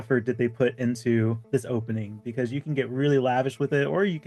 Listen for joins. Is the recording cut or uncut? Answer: uncut